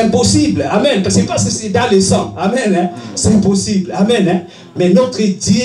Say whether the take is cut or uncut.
uncut